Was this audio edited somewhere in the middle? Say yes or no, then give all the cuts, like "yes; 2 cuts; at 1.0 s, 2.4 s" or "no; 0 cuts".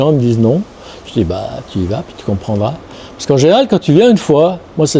no; 0 cuts